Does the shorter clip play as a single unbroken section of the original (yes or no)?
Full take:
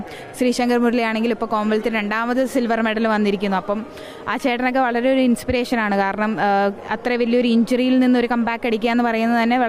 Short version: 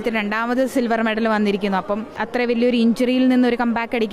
no